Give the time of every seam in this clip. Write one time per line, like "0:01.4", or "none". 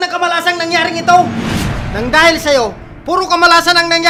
none